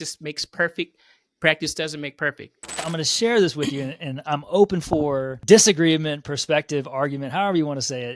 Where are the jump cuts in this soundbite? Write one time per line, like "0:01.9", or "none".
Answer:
0:02.8
0:05.3